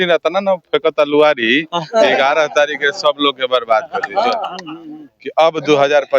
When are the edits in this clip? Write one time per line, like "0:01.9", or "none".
0:04.5